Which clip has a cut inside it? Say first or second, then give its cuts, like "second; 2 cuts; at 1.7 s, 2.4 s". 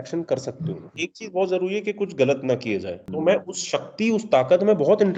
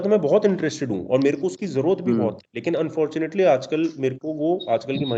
first; 2 cuts; at 0.9 s, 3.0 s